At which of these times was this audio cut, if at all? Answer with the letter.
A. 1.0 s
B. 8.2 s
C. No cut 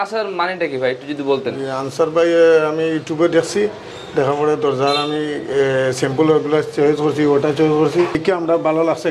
B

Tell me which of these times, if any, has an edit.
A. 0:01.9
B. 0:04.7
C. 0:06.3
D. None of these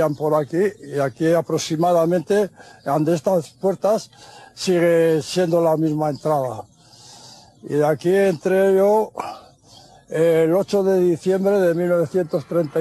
D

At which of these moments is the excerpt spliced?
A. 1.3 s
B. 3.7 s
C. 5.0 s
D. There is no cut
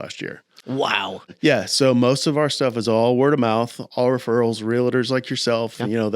A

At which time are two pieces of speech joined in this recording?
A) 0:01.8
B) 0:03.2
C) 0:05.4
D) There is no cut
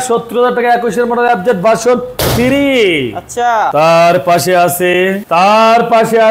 D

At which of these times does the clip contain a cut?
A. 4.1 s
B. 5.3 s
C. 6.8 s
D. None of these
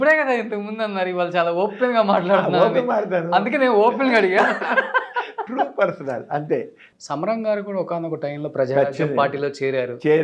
C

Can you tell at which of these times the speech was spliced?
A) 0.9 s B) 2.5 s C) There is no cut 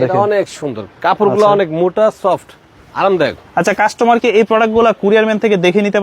C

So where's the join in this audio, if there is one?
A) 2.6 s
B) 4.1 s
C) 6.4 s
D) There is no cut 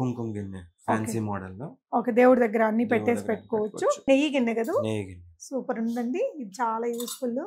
B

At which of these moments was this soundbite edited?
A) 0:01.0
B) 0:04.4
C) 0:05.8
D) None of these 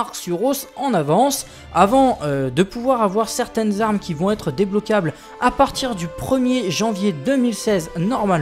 B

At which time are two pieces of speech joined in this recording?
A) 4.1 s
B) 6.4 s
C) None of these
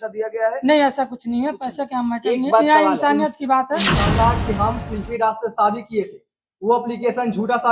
A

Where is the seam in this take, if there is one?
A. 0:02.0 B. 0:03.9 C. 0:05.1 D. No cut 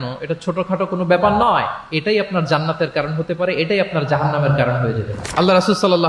D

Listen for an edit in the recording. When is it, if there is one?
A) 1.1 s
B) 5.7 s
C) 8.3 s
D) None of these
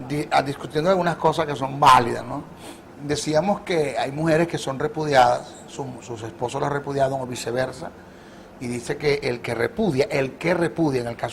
B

